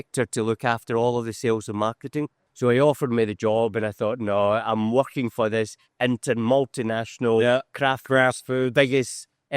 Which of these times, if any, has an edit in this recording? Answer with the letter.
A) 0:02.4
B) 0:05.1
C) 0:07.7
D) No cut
A